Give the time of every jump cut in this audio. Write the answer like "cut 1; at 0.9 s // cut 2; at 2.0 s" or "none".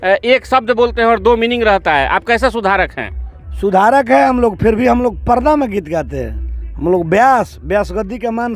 none